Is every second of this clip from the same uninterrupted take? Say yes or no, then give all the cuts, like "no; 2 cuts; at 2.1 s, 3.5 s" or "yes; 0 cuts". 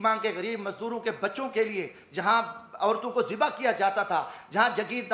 yes; 0 cuts